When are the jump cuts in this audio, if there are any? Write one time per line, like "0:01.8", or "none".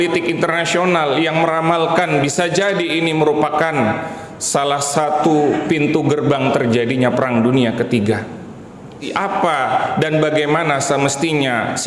0:09.1